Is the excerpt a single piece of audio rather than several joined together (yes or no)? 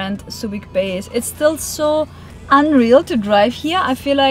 yes